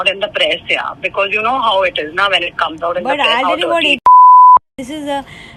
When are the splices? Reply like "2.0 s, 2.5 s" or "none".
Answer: none